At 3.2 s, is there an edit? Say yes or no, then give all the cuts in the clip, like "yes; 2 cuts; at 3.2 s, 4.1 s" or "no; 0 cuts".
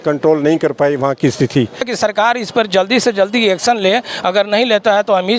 no; 1 cut; at 1.9 s